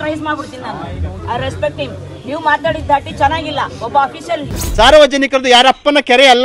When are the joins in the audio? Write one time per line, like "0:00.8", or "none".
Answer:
0:01.2
0:04.6